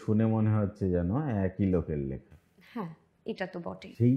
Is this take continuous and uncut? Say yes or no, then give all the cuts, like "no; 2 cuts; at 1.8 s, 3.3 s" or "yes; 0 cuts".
yes; 0 cuts